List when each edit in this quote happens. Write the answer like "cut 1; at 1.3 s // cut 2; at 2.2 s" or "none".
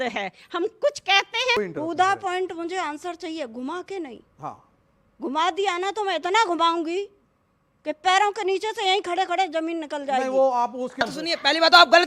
cut 1; at 1.6 s // cut 2; at 11.1 s